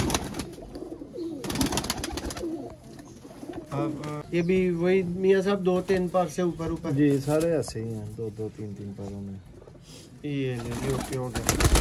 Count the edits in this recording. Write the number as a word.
one